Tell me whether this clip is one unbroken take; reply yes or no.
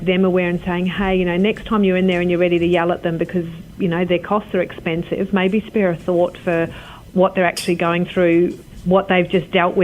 yes